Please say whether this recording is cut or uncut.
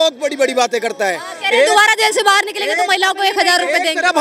uncut